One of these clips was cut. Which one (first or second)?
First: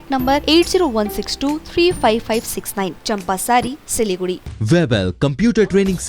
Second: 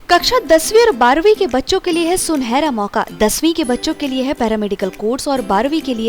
first